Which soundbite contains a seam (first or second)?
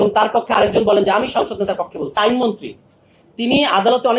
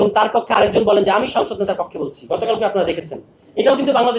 first